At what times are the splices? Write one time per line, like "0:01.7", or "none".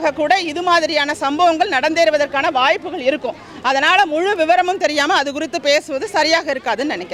none